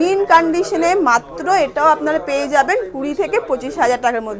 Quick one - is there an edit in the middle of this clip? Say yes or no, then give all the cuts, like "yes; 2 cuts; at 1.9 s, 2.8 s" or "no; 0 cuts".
no; 0 cuts